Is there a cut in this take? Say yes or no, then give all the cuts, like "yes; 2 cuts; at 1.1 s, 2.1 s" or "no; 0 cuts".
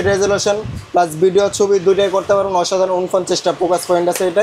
no; 0 cuts